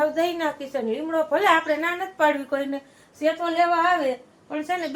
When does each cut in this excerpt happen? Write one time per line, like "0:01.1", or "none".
none